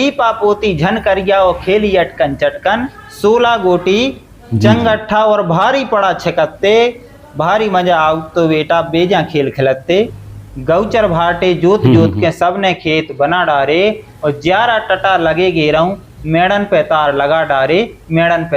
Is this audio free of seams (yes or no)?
no